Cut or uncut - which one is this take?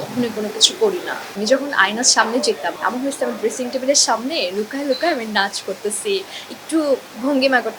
cut